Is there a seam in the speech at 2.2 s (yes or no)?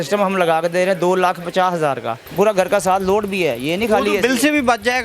yes